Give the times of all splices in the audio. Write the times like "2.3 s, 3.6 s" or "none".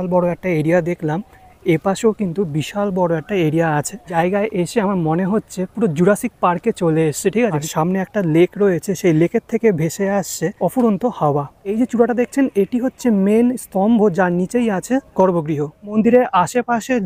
4.1 s, 7.6 s, 10.5 s, 11.7 s, 15.1 s, 15.9 s